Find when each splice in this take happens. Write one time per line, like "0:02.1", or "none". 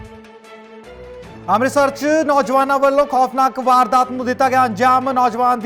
0:01.4

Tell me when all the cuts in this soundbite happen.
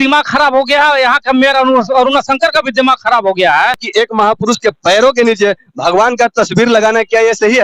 0:03.8

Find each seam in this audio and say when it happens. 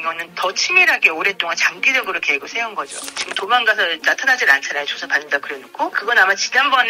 0:03.2

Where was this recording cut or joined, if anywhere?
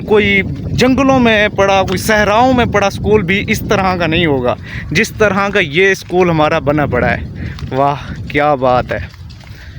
none

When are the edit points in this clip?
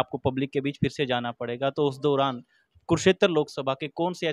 none

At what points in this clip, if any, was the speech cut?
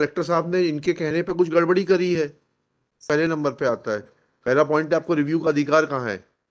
0:03.0

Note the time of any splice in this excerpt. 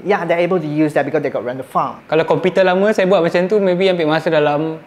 0:02.0

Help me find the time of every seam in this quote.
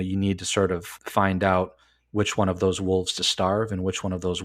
0:00.9

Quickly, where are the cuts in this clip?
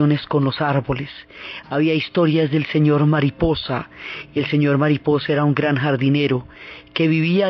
0:04.6

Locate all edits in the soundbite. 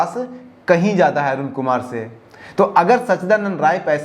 none

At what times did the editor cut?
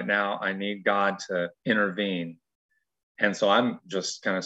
0:01.5

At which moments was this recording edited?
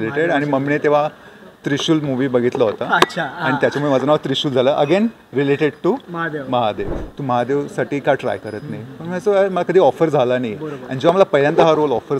0:07.1

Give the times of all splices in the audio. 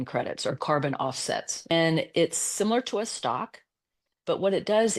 0:01.7

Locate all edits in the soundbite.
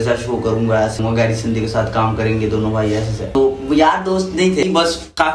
0:01.0
0:03.3
0:04.6

